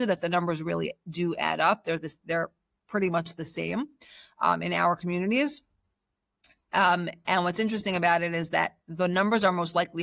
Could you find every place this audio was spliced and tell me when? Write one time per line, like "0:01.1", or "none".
none